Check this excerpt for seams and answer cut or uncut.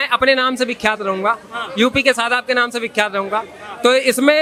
uncut